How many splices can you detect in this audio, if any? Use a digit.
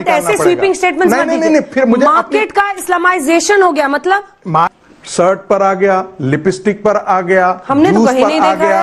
1